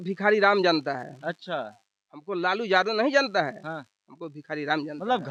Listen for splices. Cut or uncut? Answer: uncut